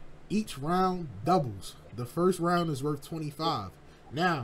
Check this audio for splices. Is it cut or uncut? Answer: uncut